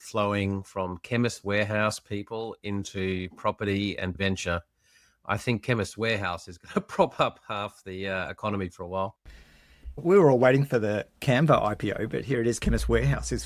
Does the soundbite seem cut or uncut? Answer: cut